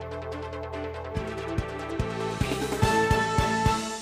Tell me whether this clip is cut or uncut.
cut